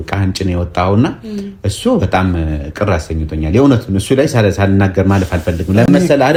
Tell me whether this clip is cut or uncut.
uncut